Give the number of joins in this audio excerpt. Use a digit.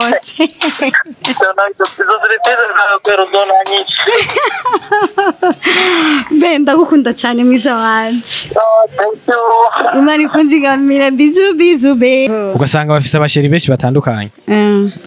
1